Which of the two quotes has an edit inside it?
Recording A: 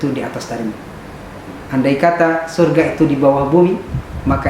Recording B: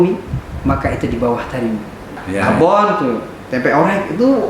B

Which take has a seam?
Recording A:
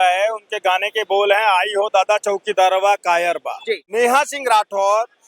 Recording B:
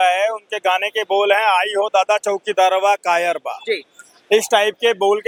A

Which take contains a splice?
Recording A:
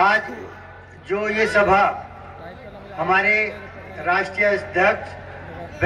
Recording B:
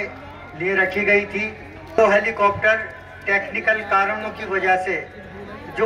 B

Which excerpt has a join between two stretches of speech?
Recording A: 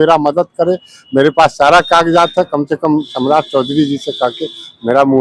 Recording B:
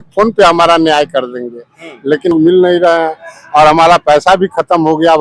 B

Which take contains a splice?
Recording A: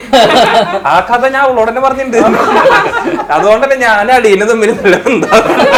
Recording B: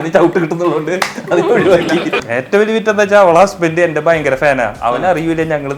B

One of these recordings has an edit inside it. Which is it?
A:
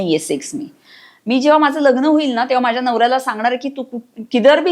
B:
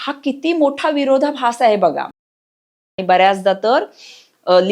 B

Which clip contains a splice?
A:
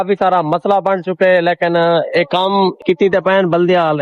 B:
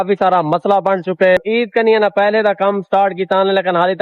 B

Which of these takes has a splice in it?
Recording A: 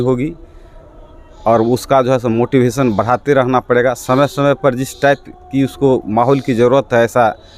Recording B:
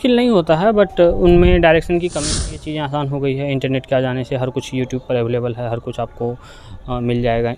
B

